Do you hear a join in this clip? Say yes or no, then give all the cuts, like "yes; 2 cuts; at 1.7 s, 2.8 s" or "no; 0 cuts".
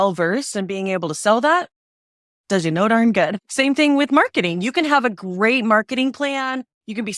yes; 1 cut; at 3.4 s